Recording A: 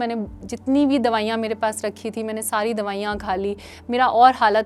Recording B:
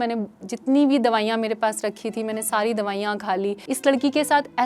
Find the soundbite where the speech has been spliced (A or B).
B